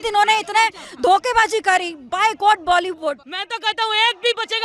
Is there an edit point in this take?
yes; 1 cut; at 3.3 s

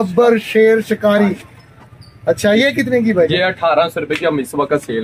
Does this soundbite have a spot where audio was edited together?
no; 0 cuts

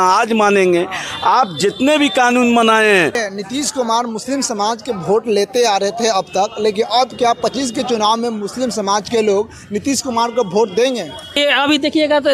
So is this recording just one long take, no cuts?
no; 2 cuts; at 3.2 s, 11.4 s

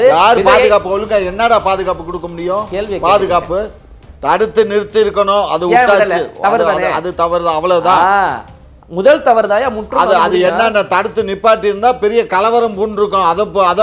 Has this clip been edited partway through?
yes; 1 cut; at 4.0 s

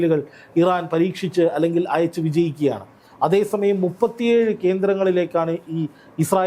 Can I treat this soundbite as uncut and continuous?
yes; 0 cuts

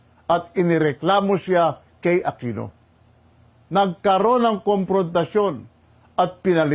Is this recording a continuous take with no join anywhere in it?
no; 1 cut; at 2.5 s

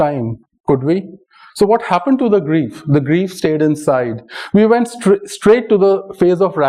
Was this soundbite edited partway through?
no; 0 cuts

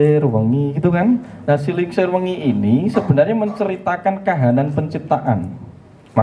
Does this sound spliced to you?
no; 0 cuts

